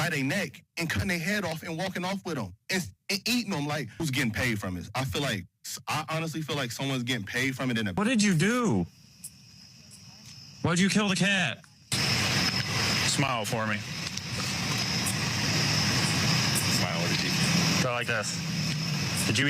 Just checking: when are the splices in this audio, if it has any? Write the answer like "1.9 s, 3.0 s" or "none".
4.0 s, 8.0 s